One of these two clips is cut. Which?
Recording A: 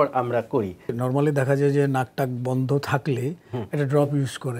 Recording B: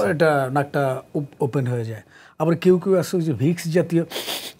A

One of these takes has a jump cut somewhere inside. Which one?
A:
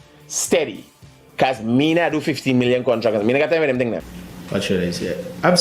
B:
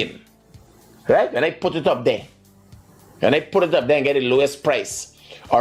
A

